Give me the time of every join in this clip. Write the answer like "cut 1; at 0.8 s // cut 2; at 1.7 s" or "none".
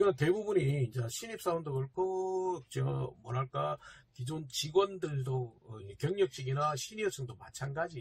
none